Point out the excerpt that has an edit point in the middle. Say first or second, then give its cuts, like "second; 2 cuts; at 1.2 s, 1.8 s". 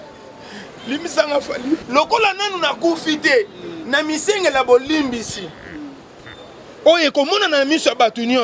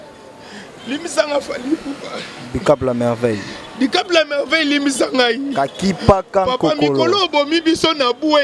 first; 1 cut; at 1.8 s